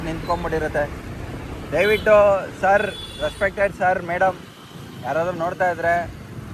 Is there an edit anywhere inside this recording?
no; 0 cuts

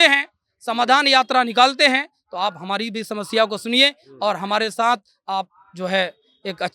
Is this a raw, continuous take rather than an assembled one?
yes; 0 cuts

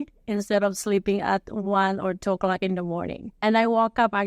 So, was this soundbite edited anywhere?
yes; 1 cut; at 3.2 s

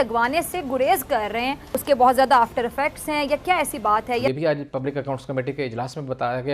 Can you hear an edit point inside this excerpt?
yes; 2 cuts; at 1.7 s, 4.2 s

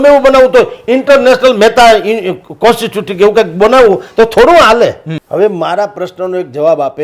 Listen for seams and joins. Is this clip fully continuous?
no; 1 cut; at 5.1 s

